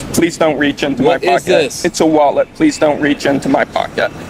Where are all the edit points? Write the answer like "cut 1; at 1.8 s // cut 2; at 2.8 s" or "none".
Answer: none